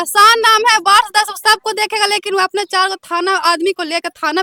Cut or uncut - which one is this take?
uncut